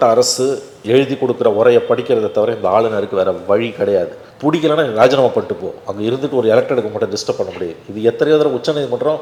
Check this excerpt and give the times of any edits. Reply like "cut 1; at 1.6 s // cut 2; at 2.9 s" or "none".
none